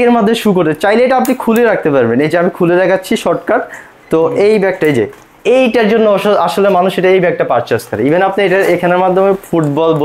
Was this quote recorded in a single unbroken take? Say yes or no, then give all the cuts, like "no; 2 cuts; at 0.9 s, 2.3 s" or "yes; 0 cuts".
yes; 0 cuts